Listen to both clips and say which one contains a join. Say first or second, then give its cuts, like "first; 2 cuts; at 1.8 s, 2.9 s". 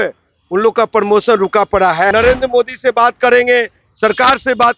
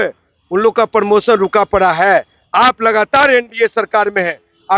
first; 1 cut; at 2.1 s